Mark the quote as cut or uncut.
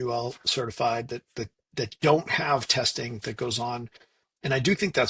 uncut